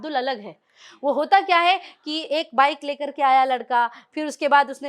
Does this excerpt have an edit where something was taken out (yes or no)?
no